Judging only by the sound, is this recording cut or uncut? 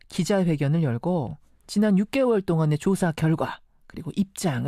uncut